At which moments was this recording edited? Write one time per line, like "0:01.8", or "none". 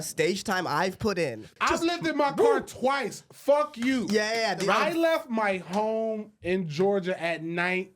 0:01.4
0:04.6